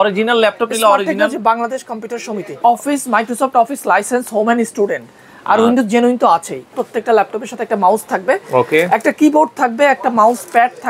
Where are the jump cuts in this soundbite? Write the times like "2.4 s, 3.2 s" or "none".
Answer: 2.6 s, 6.8 s